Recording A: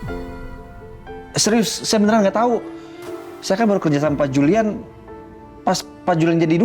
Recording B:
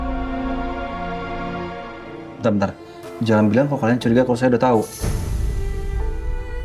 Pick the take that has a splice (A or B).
B